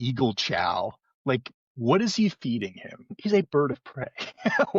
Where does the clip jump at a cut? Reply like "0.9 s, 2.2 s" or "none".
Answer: 3.1 s